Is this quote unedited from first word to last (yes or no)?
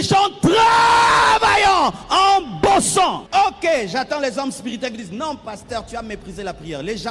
no